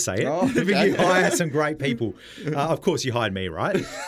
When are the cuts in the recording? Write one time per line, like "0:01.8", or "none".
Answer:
none